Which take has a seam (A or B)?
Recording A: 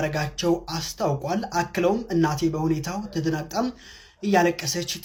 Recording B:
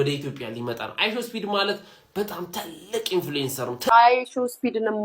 B